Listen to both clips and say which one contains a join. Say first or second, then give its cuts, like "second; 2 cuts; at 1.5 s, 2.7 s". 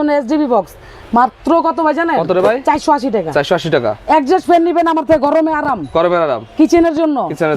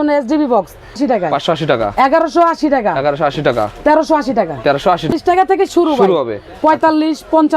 second; 2 cuts; at 1.0 s, 5.1 s